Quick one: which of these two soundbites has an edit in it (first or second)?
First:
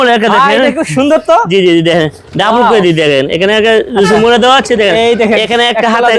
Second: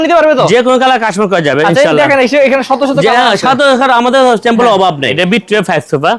second